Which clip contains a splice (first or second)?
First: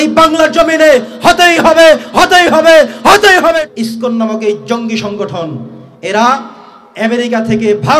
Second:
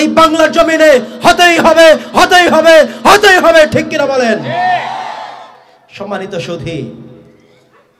first